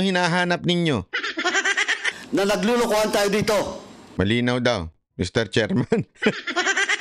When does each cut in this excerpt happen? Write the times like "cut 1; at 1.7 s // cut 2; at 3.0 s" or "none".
cut 1; at 2.1 s